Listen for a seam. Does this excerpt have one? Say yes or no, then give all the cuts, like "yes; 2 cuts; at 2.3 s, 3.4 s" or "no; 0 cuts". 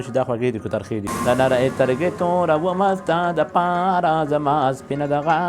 yes; 1 cut; at 1.1 s